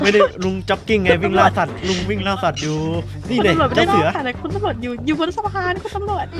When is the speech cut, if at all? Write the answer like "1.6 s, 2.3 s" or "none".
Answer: 3.2 s